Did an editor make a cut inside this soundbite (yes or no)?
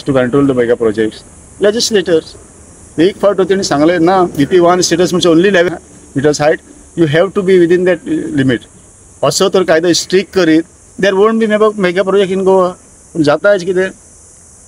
yes